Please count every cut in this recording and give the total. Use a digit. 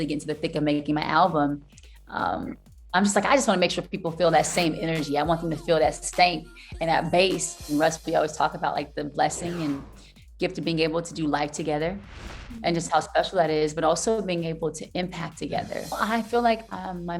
2